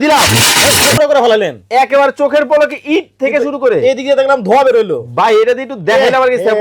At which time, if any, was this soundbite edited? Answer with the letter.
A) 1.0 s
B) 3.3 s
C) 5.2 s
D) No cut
A